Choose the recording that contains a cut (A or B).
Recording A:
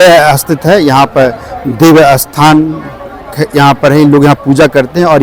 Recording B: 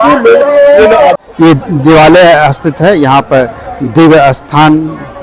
B